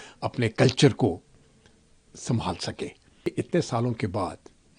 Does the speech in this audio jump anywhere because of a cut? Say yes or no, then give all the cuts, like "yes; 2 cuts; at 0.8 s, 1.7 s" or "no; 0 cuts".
yes; 1 cut; at 3.3 s